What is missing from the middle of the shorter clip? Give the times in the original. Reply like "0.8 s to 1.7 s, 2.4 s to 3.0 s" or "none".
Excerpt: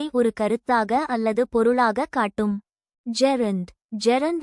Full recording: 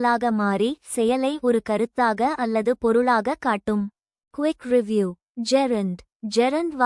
4.2 s to 5.2 s